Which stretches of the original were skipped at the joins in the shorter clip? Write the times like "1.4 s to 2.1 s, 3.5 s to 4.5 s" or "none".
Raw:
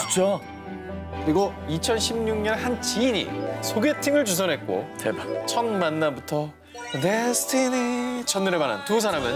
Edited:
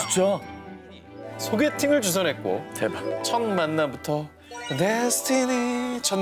1.1 s to 3.3 s